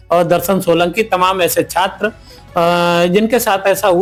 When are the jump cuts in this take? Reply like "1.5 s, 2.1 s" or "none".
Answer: none